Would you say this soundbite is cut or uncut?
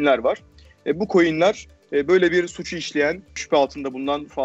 cut